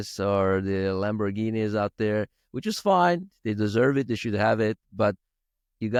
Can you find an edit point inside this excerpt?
no; 0 cuts

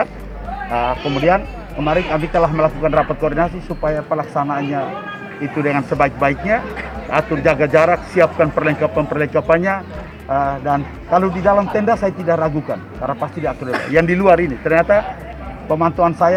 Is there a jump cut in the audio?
no; 0 cuts

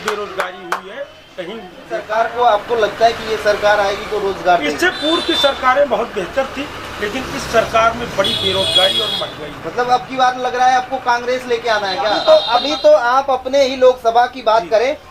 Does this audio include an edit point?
yes; 2 cuts; at 2.0 s, 12.2 s

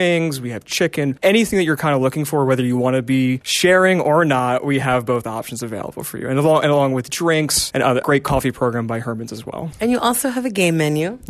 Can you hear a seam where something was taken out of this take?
yes; 2 cuts; at 1.2 s, 9.6 s

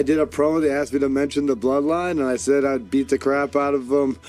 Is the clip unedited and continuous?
yes; 0 cuts

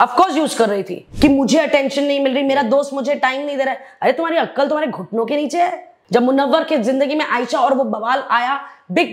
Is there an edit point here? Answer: yes; 2 cuts; at 1.0 s, 5.9 s

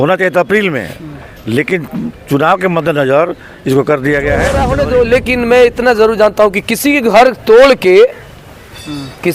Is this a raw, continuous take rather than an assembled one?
no; 1 cut; at 4.6 s

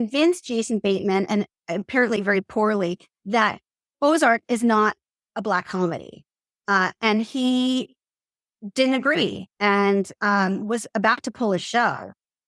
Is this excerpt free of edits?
yes; 0 cuts

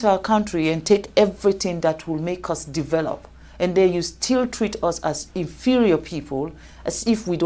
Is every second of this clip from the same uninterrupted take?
yes; 0 cuts

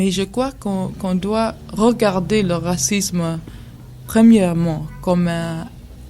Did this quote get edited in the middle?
yes; 1 cut; at 3.9 s

